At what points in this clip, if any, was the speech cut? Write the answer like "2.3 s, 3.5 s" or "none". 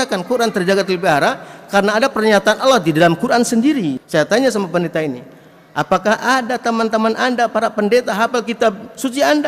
4.0 s